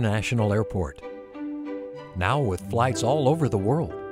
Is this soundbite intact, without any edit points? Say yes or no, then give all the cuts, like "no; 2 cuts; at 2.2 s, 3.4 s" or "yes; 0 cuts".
yes; 0 cuts